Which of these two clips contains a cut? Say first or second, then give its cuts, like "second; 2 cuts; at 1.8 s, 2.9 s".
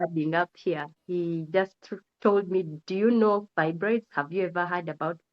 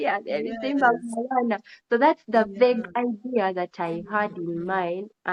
first; 1 cut; at 0.9 s